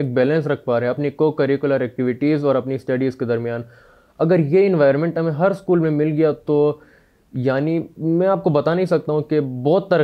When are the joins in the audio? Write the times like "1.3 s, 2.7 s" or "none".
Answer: none